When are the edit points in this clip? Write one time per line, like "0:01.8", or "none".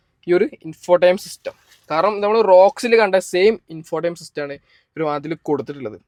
none